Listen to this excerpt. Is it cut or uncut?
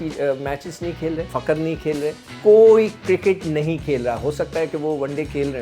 cut